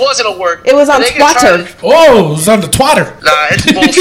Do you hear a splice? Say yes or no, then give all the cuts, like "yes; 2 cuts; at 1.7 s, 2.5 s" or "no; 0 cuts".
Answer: yes; 2 cuts; at 1.7 s, 3.2 s